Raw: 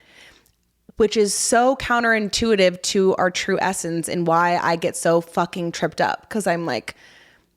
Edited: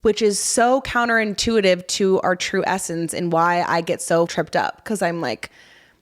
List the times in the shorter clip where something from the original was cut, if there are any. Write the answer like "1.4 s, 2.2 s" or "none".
4.3 s